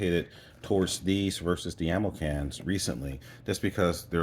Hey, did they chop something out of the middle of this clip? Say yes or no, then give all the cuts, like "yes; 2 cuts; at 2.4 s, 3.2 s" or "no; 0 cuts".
no; 0 cuts